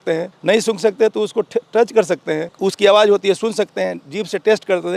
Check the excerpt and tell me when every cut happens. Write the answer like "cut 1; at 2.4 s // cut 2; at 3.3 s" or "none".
none

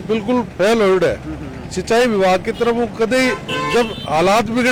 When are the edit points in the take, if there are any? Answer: none

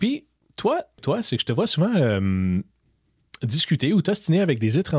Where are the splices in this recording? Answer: cut 1; at 1.0 s

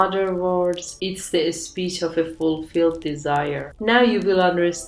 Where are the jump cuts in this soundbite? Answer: cut 1; at 3.7 s

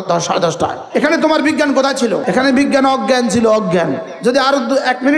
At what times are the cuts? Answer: cut 1; at 0.8 s // cut 2; at 2.2 s // cut 3; at 4.1 s

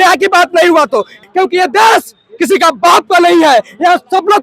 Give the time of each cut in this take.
cut 1; at 1.2 s

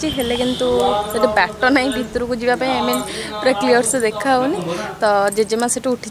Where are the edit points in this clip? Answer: none

